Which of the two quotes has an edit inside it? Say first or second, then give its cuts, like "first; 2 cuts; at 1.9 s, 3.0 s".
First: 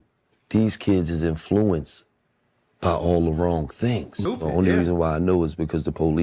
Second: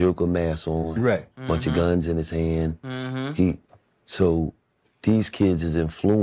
first; 1 cut; at 4.2 s